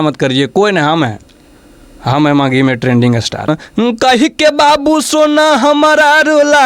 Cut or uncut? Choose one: cut